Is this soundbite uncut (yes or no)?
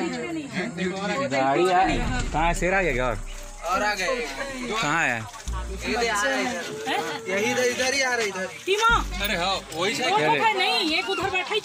yes